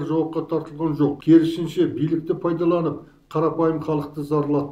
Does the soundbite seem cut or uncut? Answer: cut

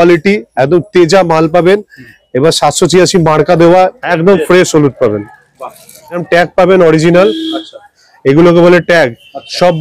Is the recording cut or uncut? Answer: cut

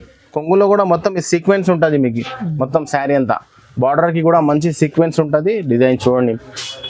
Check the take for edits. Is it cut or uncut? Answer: uncut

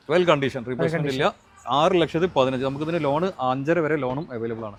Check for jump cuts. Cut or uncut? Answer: uncut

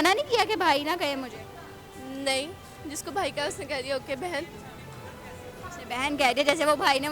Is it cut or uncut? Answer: uncut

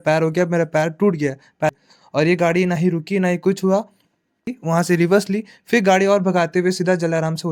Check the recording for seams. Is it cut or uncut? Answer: cut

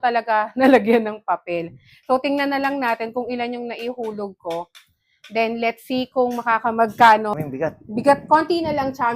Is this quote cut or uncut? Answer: cut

